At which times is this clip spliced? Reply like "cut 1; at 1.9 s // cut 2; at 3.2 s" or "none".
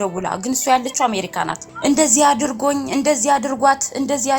cut 1; at 1.6 s